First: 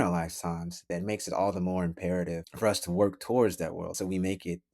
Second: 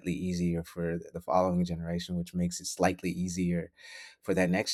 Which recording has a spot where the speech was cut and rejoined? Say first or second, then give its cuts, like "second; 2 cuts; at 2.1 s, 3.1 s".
first; 3 cuts; at 0.9 s, 2.5 s, 3.9 s